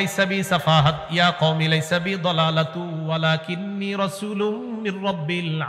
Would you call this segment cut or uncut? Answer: uncut